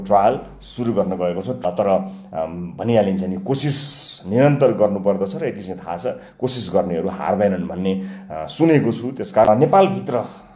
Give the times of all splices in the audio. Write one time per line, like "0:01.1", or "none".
0:01.6
0:09.5